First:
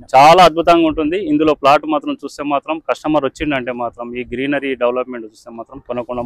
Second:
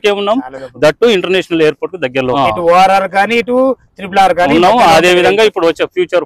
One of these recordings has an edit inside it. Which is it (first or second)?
second